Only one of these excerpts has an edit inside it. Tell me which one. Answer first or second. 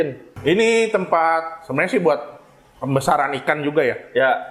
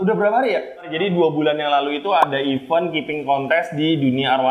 second